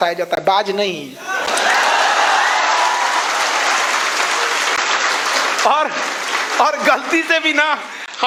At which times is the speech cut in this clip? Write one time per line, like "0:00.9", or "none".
none